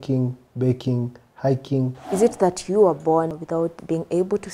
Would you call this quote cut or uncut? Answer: cut